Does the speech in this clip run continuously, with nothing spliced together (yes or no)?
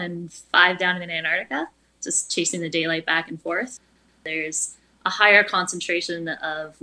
no